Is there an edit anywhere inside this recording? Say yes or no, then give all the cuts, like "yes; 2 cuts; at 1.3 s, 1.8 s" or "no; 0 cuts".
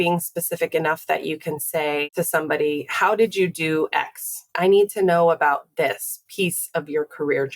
yes; 2 cuts; at 2.1 s, 4.5 s